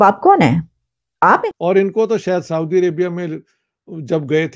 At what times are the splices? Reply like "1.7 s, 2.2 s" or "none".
1.4 s